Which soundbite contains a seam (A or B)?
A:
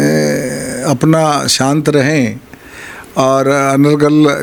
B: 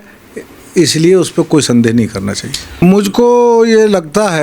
B